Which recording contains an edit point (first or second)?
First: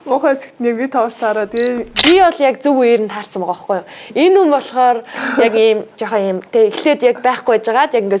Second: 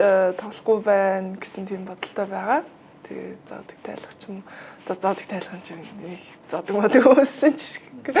first